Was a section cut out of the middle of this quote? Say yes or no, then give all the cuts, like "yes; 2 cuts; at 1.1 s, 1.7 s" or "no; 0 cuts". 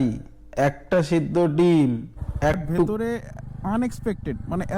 yes; 1 cut; at 2.9 s